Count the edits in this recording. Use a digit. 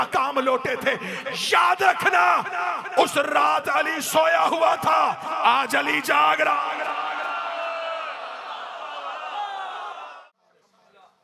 1